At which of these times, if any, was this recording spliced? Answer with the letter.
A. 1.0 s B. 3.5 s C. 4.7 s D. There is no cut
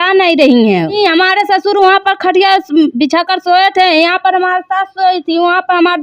A